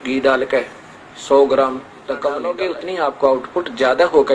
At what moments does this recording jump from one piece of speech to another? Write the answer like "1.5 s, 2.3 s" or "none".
2.4 s